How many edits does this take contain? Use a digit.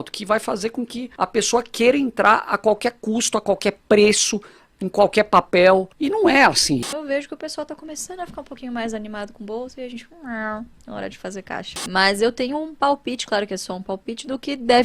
4